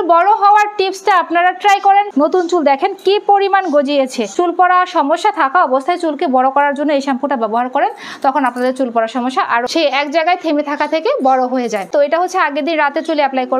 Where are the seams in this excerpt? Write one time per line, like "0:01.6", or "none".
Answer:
0:02.1
0:04.2
0:09.7
0:11.9